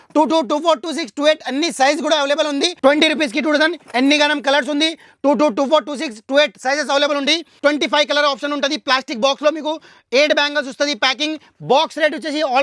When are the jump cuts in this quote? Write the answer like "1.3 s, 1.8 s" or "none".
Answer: 2.7 s, 7.6 s